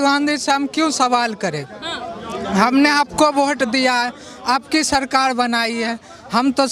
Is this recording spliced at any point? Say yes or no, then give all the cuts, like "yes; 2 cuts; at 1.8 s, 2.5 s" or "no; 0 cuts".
no; 0 cuts